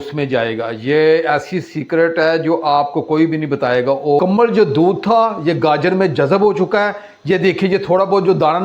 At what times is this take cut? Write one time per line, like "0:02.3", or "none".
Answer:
0:04.2